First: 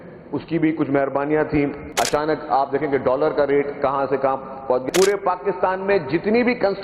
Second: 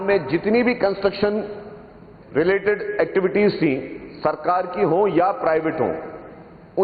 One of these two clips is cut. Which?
first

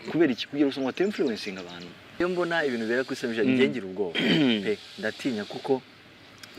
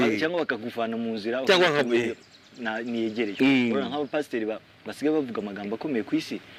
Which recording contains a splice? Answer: first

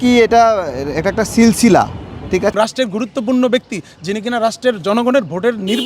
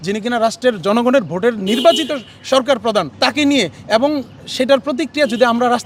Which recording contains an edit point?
first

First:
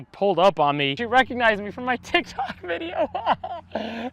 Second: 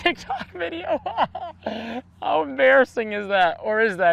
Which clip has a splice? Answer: first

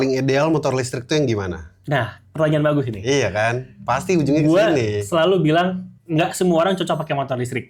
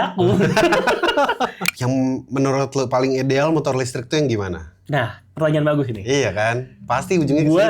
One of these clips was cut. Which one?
second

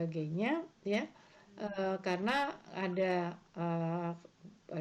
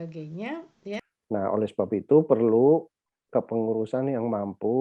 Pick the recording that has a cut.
second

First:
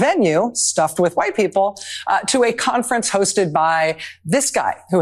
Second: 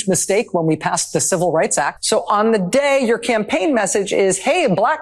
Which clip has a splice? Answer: second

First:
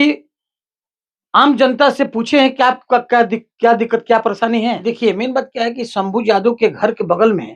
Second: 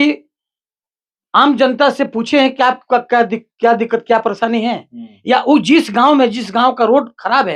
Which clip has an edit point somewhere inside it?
first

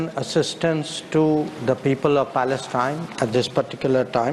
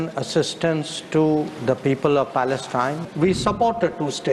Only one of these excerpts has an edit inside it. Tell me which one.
second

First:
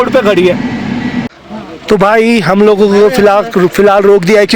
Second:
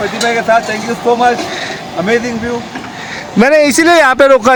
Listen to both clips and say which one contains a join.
first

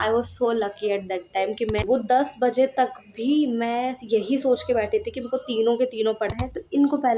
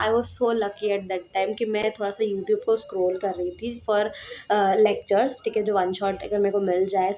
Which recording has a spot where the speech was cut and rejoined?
first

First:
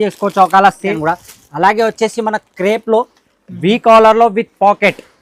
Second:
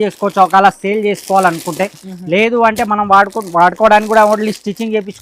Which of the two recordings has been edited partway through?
first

